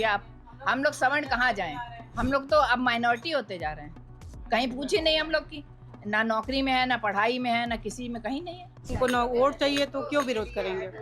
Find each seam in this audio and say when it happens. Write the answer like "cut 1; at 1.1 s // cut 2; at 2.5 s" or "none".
cut 1; at 8.8 s